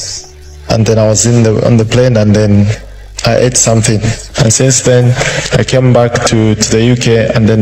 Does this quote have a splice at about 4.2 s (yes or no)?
yes